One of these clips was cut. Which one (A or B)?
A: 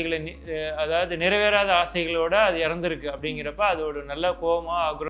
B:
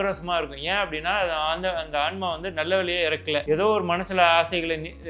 B